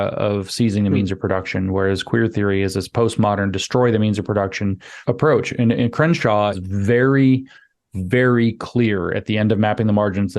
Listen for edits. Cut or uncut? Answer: cut